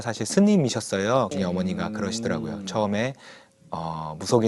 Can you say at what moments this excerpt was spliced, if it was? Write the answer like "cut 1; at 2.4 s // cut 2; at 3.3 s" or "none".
cut 1; at 1.3 s